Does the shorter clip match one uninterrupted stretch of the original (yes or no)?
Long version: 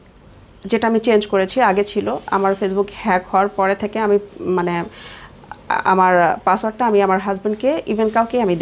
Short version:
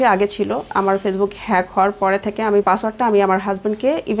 no